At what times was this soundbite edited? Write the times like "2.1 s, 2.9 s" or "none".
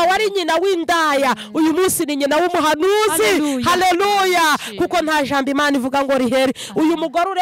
none